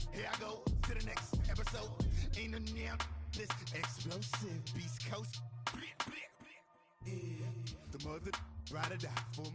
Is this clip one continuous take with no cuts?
yes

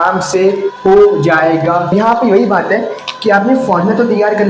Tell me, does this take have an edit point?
yes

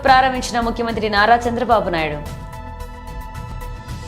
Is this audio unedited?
yes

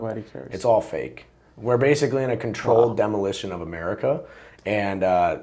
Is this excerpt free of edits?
yes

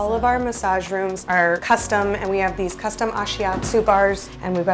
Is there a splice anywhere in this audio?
no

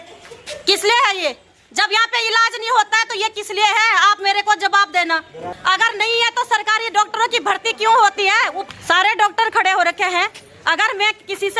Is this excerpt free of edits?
no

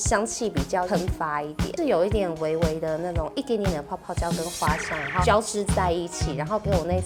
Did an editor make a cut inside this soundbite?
no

